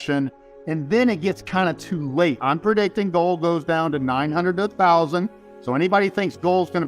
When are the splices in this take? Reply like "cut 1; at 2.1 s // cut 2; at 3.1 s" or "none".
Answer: cut 1; at 2.4 s // cut 2; at 5.5 s